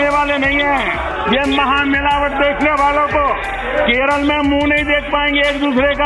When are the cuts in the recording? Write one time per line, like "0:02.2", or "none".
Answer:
0:01.0
0:03.6